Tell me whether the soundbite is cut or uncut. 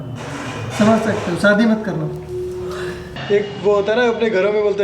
cut